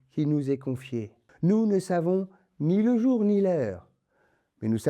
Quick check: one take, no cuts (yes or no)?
no